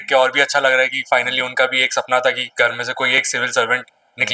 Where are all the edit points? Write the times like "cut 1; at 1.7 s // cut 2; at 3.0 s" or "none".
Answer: none